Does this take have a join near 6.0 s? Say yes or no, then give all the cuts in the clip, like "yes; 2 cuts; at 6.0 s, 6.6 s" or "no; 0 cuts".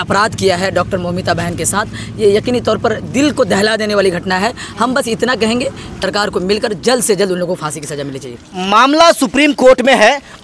yes; 1 cut; at 6.0 s